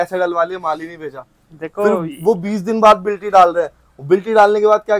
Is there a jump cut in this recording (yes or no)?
no